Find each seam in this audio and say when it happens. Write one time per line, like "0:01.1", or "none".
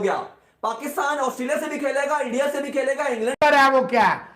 0:03.4